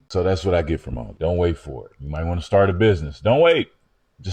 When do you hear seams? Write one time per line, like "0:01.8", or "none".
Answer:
0:01.1